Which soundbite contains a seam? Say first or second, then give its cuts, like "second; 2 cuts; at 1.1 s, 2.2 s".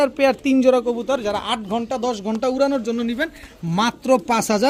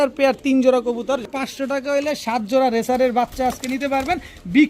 second; 1 cut; at 1.2 s